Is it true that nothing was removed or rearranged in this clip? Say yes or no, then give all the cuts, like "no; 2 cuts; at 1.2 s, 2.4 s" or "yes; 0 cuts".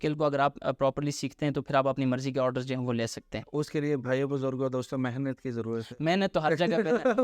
yes; 0 cuts